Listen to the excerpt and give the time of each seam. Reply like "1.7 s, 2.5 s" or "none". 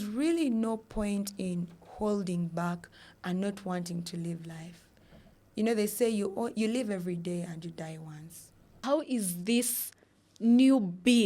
8.7 s